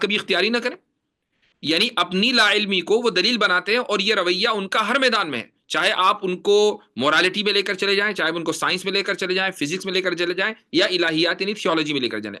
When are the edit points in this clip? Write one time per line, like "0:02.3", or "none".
none